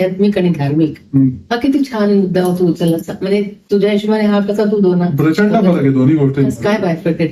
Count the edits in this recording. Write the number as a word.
zero